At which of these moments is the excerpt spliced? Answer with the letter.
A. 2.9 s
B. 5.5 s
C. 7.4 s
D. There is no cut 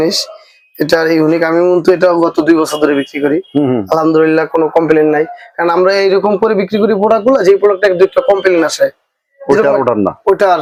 D